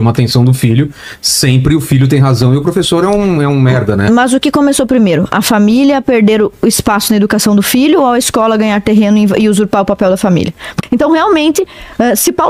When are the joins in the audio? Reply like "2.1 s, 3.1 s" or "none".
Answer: 10.8 s